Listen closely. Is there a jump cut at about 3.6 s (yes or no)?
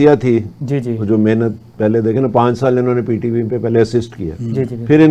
no